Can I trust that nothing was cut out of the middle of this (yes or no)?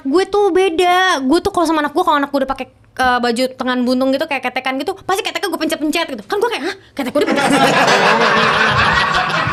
yes